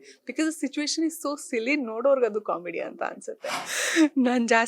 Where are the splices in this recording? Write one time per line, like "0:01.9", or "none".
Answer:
0:03.7